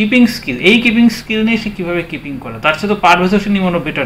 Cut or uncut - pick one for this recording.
uncut